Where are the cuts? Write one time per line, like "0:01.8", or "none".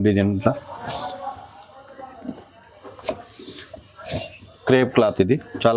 none